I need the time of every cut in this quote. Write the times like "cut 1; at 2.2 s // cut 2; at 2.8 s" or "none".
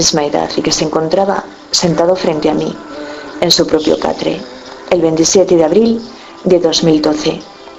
cut 1; at 5.8 s